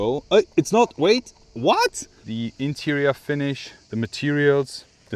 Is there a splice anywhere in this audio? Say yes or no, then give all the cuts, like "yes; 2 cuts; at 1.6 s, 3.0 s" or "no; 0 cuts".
yes; 1 cut; at 2.2 s